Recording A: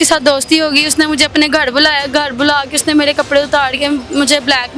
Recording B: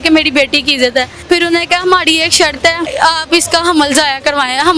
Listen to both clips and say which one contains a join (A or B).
B